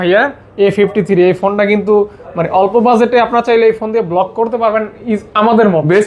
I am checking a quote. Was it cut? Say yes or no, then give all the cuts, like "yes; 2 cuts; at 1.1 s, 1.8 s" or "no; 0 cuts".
no; 0 cuts